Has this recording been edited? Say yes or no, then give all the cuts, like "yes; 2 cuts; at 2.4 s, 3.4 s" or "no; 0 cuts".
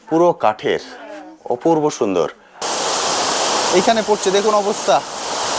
yes; 1 cut; at 2.6 s